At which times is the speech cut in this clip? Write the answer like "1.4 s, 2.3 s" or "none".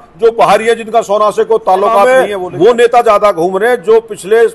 2.0 s